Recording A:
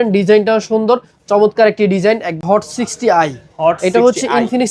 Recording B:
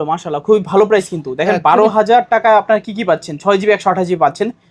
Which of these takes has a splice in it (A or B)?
A